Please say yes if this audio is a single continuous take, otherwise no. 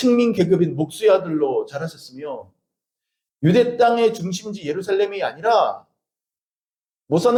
yes